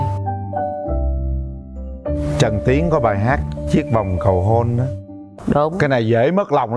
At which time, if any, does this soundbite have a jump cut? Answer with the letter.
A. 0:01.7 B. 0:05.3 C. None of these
B